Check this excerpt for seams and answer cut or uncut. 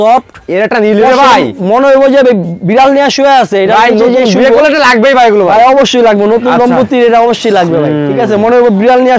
uncut